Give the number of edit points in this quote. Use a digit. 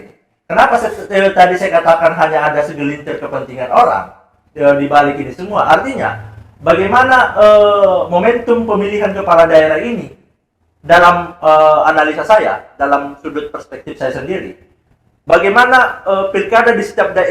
0